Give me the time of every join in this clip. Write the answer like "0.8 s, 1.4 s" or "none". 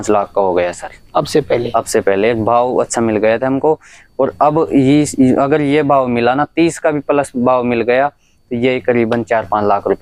none